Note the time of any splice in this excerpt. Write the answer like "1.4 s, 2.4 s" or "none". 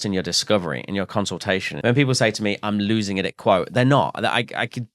1.7 s